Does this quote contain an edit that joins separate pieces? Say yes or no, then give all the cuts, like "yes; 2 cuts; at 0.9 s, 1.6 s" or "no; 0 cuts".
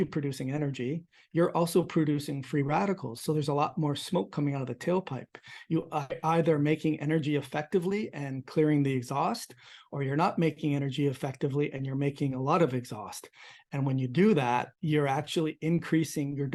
no; 0 cuts